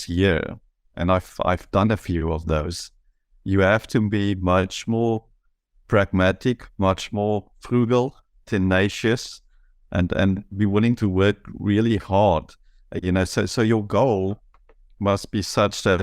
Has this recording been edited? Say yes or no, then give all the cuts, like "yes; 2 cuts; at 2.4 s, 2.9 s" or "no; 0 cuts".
yes; 1 cut; at 13.5 s